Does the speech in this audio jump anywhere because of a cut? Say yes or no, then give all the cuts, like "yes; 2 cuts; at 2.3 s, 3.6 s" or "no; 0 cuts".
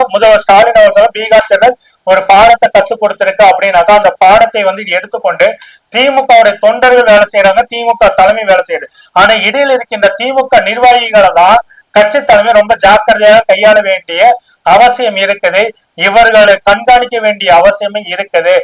no; 0 cuts